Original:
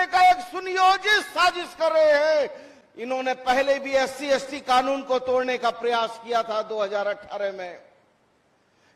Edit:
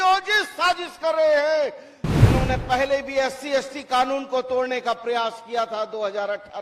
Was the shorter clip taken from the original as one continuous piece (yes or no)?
yes